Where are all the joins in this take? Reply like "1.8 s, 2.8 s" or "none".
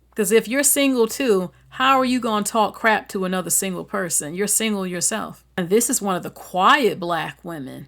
5.4 s